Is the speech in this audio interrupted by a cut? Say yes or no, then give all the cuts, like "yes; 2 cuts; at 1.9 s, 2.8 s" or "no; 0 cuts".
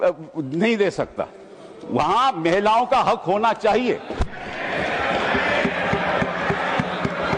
no; 0 cuts